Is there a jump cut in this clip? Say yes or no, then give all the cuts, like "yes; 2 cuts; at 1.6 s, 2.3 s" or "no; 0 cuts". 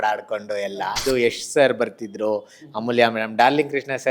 yes; 1 cut; at 1.0 s